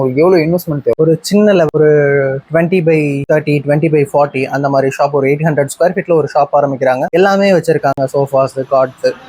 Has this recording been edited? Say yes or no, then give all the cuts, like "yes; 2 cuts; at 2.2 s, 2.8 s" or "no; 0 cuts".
yes; 2 cuts; at 3.2 s, 7.0 s